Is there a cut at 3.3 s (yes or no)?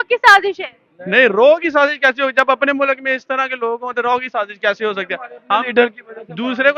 no